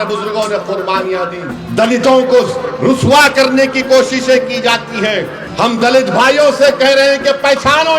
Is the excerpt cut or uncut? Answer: cut